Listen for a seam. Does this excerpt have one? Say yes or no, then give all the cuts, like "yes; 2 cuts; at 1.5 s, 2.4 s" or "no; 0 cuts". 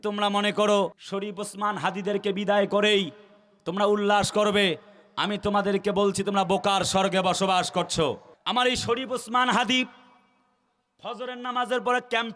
yes; 2 cuts; at 1.0 s, 8.3 s